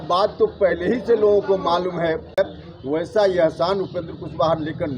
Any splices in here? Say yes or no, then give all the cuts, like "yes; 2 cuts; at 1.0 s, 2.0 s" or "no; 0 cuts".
yes; 1 cut; at 2.4 s